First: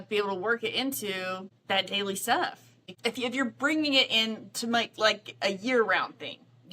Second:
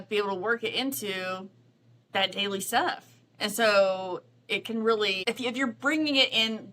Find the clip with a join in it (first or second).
first